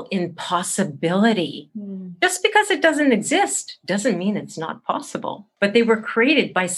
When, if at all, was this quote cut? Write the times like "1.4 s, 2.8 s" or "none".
5.4 s